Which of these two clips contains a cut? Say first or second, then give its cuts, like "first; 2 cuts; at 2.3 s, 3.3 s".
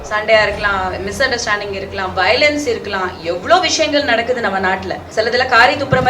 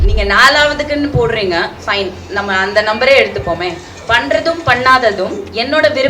first; 1 cut; at 5.0 s